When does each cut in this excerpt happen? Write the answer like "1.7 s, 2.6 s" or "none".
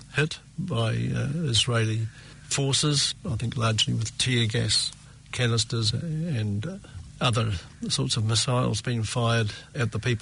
none